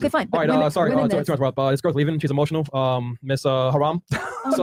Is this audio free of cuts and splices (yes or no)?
yes